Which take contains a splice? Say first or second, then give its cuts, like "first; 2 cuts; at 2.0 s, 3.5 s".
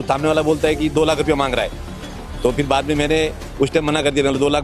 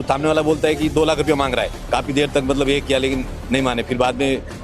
second; 1 cut; at 1.8 s